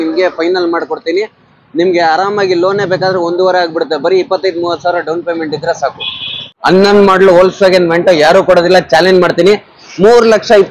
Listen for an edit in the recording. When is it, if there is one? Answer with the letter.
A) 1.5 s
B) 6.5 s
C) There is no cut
B